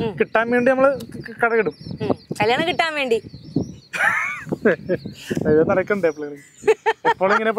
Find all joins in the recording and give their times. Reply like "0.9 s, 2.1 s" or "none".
none